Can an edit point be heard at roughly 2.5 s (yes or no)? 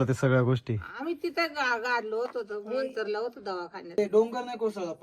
no